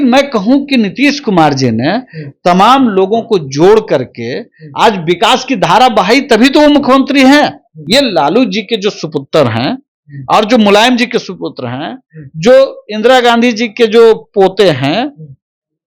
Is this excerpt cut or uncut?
cut